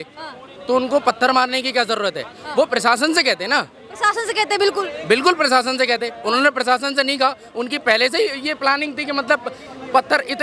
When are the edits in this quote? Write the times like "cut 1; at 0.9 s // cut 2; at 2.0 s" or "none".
none